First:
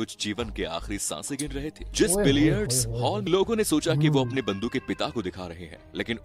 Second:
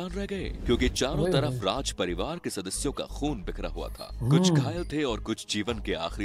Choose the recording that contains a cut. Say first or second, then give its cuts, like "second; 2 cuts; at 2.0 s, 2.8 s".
first; 1 cut; at 3.2 s